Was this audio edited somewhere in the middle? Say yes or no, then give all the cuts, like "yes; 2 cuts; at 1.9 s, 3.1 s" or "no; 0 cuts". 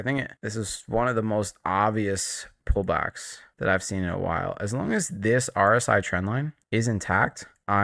no; 0 cuts